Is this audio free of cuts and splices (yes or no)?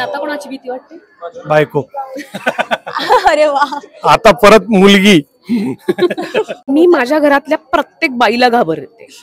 no